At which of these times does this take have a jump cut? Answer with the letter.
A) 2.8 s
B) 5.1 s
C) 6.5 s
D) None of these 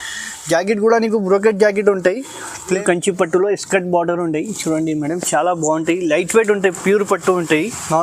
A